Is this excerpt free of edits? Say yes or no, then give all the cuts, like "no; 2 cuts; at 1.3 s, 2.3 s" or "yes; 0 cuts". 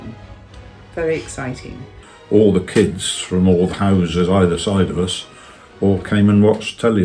no; 1 cut; at 1.9 s